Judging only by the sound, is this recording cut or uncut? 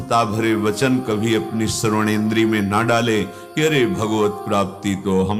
uncut